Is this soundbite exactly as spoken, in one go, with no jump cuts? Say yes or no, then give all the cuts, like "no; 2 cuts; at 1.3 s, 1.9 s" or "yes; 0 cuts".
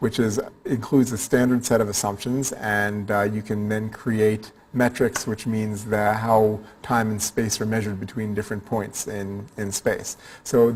yes; 0 cuts